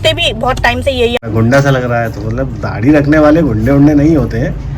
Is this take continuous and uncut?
no; 1 cut; at 1.2 s

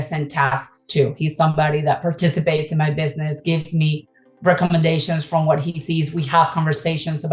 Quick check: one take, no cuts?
yes; 0 cuts

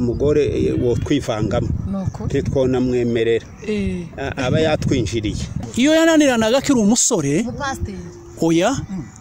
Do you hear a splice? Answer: yes; 1 cut; at 5.5 s

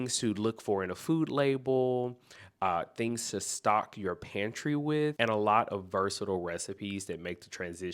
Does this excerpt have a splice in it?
no; 0 cuts

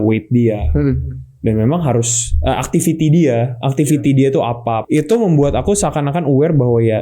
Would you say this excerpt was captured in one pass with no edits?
no; 1 cut; at 4.8 s

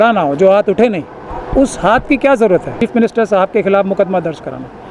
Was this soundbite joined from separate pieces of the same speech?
yes; 1 cut; at 2.7 s

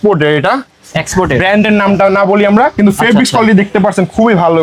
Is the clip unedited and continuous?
yes; 0 cuts

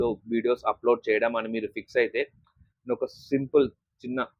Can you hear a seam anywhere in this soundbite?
no; 0 cuts

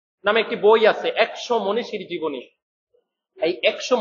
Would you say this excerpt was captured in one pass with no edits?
yes; 0 cuts

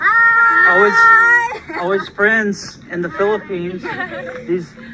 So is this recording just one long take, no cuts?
yes; 0 cuts

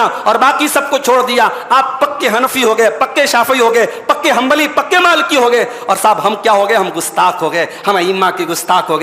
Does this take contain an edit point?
no; 0 cuts

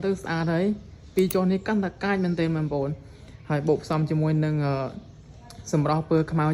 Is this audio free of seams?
no; 1 cut; at 1.1 s

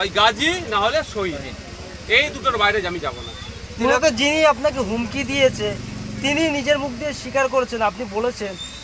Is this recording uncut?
yes; 0 cuts

